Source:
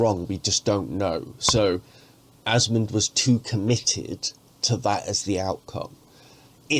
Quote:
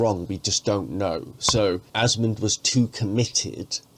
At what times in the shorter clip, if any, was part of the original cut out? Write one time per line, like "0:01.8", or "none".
0:01.9